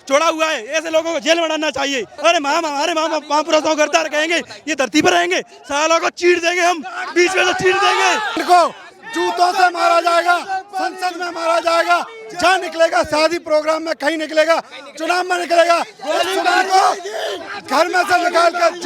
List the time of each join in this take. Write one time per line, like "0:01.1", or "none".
0:02.1
0:08.4

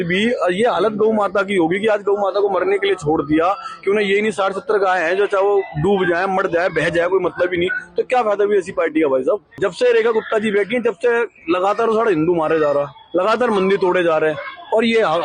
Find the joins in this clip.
0:09.6

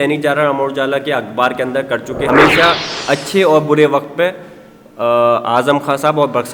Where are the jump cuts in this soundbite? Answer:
0:02.2

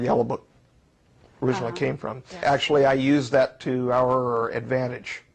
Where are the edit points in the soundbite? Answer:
0:02.4

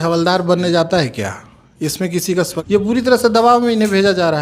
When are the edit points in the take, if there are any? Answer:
0:02.6

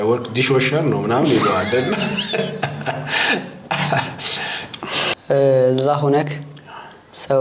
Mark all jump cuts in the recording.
0:05.1

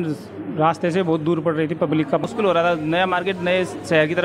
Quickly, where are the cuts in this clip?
0:02.2

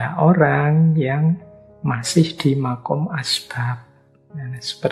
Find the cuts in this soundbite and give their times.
none

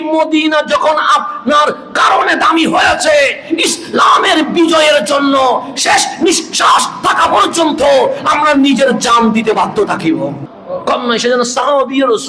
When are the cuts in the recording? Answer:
0:10.5

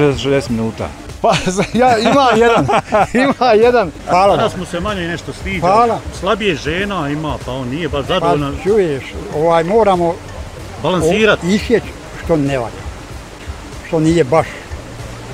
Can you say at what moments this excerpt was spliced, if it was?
0:04.0

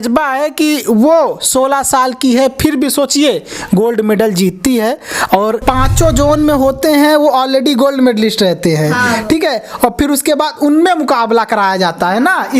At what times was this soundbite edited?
0:05.6

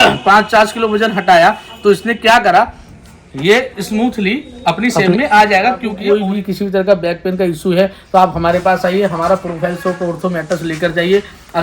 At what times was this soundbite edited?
0:05.9

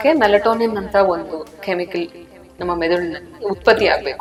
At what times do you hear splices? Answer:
none

